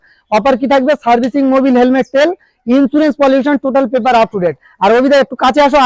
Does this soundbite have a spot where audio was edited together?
no; 0 cuts

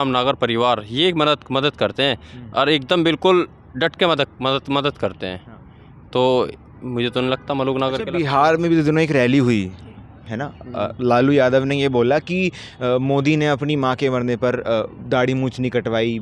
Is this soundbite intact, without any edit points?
yes; 0 cuts

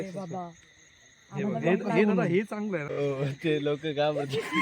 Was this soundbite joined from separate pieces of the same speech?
yes; 1 cut; at 2.9 s

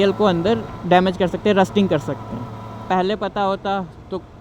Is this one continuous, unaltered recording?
no; 1 cut; at 2.8 s

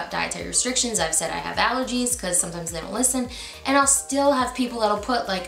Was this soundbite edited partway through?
no; 0 cuts

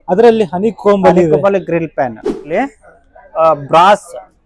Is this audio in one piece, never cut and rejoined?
no; 1 cut; at 2.5 s

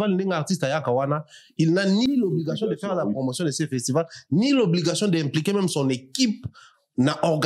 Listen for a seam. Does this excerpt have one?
yes; 1 cut; at 2.1 s

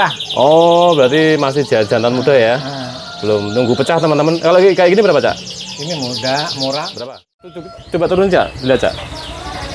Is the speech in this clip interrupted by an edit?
yes; 1 cut; at 7.8 s

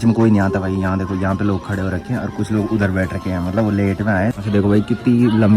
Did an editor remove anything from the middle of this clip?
yes; 1 cut; at 4.4 s

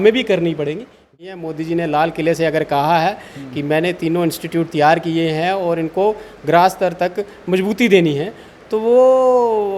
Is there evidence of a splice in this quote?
yes; 1 cut; at 1.2 s

